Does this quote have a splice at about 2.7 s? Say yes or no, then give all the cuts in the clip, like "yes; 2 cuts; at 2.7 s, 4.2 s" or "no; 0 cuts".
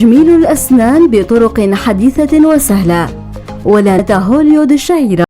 no; 1 cut; at 4.0 s